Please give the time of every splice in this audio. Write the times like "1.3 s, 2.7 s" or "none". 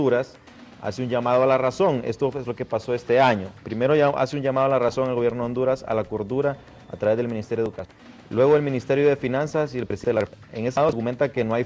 none